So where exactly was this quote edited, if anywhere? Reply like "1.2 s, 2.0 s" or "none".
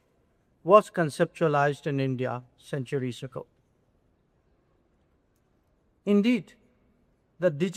none